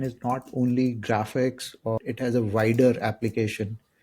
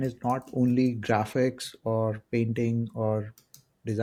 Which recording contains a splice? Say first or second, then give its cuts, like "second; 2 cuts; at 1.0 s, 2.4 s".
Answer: first; 1 cut; at 2.0 s